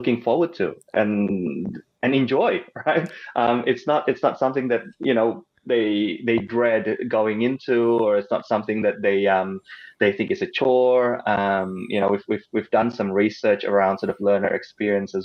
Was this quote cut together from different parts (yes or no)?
no